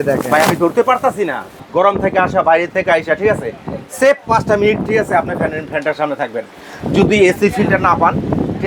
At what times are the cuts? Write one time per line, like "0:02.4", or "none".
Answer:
0:01.5